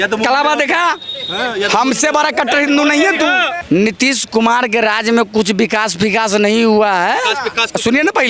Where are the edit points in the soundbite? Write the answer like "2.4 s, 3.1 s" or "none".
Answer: 3.6 s